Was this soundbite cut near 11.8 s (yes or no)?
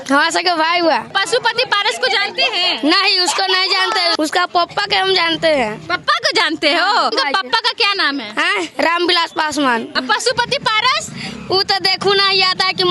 no